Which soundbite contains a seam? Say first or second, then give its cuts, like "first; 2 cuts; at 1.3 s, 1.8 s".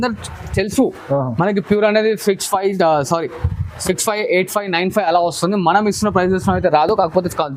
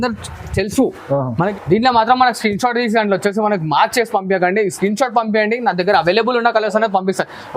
second; 1 cut; at 1.6 s